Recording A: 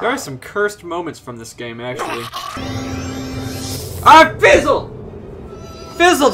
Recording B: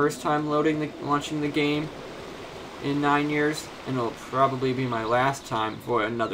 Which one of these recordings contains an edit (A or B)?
A